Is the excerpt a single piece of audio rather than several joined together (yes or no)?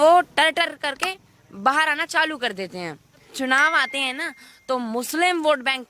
no